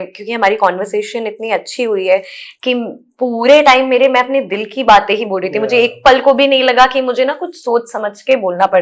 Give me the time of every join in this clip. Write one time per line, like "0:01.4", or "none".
none